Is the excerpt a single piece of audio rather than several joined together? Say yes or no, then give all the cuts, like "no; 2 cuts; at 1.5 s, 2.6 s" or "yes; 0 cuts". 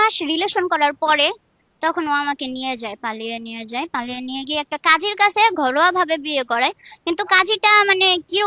yes; 0 cuts